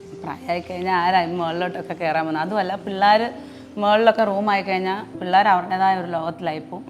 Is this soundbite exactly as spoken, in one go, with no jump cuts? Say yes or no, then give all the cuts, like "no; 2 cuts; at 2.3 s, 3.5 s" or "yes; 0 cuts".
no; 1 cut; at 5.1 s